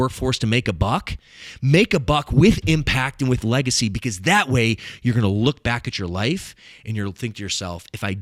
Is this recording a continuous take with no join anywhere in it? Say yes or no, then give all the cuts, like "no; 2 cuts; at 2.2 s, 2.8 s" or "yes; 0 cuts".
yes; 0 cuts